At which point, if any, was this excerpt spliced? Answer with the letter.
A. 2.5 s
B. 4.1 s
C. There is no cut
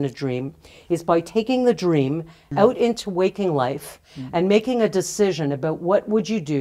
A